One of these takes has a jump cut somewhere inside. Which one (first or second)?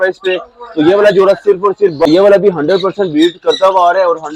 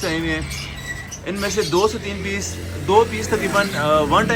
first